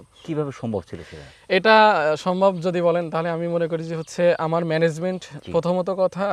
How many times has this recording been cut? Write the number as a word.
zero